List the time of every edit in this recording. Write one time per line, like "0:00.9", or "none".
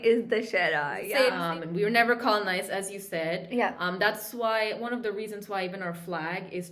0:01.4